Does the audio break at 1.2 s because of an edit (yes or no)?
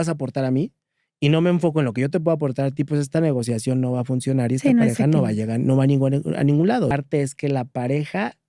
no